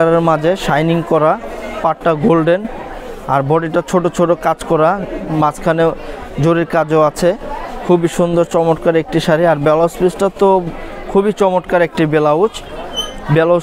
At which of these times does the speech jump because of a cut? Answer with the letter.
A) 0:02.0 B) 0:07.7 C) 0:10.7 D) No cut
D